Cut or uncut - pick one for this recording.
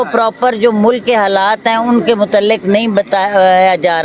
uncut